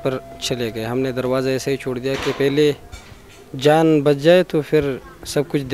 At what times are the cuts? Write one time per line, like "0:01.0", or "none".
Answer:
none